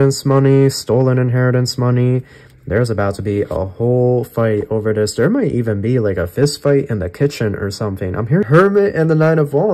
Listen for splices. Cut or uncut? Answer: cut